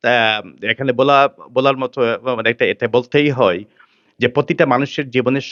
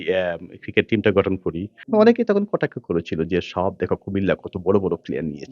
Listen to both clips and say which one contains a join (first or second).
second